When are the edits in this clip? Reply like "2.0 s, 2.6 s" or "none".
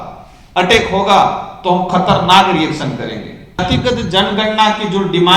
3.6 s